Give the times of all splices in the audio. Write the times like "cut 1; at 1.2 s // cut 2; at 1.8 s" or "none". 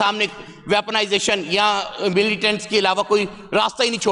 none